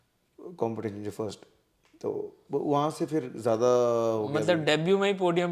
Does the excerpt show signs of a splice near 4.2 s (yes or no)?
no